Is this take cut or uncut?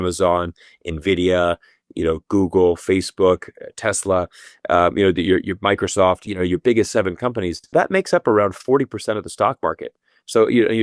cut